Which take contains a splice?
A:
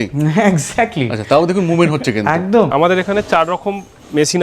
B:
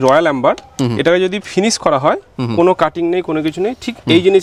A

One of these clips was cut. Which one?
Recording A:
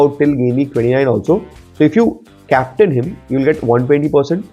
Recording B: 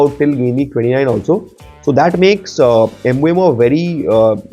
A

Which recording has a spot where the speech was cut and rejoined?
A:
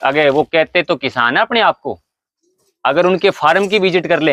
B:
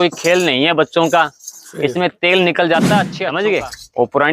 B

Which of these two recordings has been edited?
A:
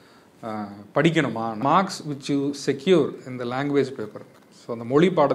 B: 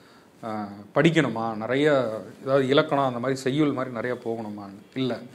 A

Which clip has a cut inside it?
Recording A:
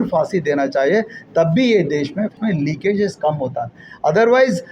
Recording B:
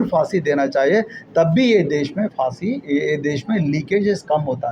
A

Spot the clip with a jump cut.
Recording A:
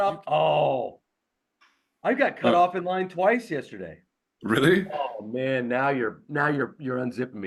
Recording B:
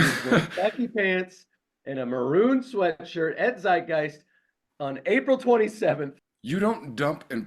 B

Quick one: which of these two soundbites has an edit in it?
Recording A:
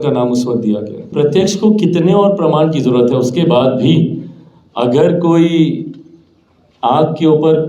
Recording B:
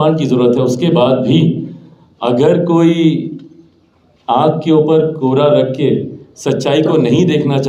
A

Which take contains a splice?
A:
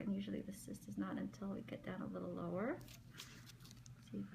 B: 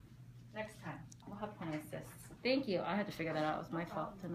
A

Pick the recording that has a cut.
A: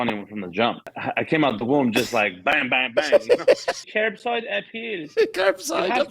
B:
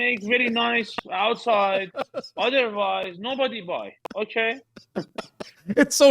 A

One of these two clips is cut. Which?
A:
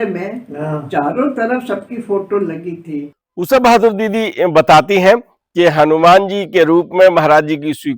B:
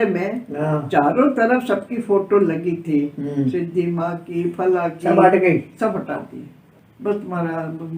A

